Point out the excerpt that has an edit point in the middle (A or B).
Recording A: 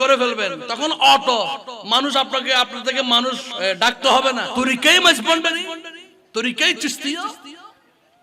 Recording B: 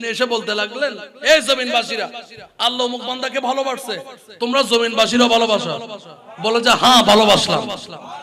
A